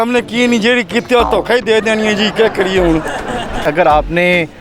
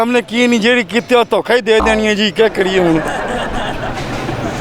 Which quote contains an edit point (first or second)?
first